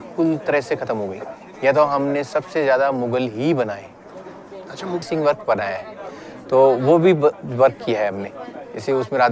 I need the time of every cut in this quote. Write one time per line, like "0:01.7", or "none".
0:05.0